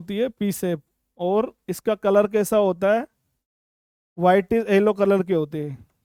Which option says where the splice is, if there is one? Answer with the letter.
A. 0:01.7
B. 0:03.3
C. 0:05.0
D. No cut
D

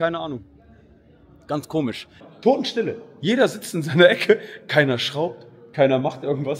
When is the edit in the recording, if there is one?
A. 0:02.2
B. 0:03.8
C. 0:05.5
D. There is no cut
A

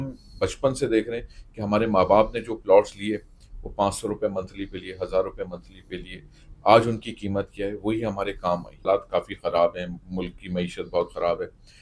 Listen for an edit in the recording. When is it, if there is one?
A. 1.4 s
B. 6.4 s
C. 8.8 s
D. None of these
C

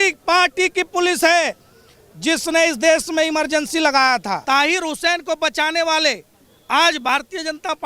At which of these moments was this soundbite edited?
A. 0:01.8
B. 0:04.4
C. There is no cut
B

